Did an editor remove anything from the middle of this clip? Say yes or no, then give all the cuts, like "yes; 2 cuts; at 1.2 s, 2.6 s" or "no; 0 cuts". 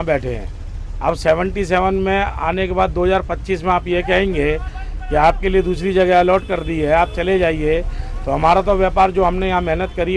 no; 0 cuts